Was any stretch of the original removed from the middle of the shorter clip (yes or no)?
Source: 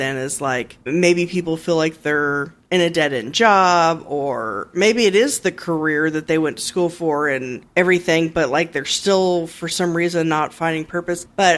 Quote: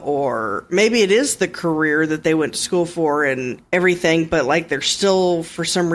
no